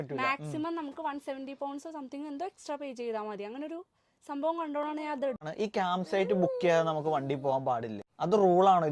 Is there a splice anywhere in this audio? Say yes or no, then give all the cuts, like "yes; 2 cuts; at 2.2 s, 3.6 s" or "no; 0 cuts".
yes; 2 cuts; at 5.5 s, 8.0 s